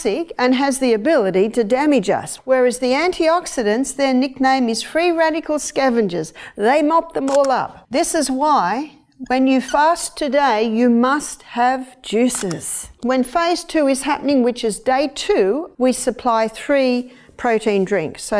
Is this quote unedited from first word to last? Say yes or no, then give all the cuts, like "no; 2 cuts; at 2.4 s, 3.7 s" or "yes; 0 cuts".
no; 4 cuts; at 2.3 s, 7.8 s, 12.9 s, 15.7 s